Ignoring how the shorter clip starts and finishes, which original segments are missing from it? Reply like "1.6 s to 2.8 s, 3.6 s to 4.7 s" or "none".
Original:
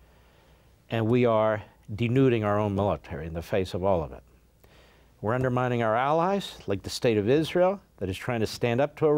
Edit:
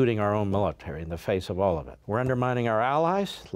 4.2 s to 5.1 s